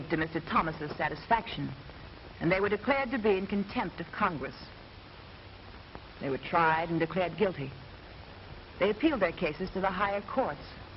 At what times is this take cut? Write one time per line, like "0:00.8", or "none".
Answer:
0:09.6